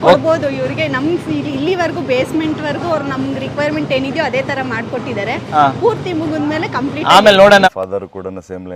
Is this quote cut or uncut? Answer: cut